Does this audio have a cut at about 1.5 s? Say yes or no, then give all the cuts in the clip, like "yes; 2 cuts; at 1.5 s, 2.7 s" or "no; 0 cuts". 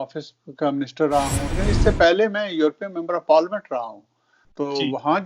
yes; 1 cut; at 1.5 s